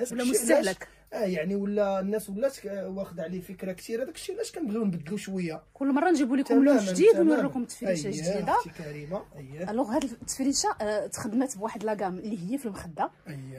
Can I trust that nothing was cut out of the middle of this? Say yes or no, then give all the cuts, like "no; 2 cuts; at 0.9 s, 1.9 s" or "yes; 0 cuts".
yes; 0 cuts